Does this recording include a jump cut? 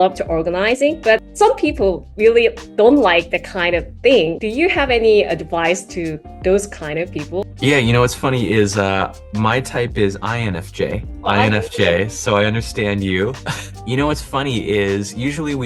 no; 0 cuts

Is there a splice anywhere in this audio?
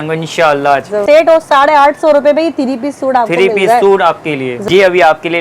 yes; 2 cuts; at 1.0 s, 4.6 s

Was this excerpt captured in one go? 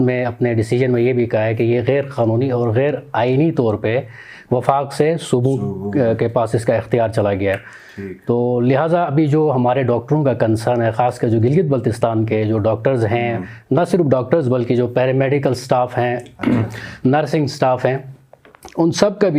yes; 0 cuts

